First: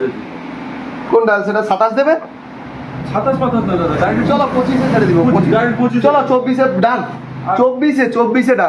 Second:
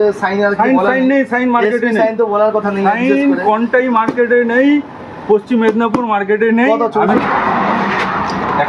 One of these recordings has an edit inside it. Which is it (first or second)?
second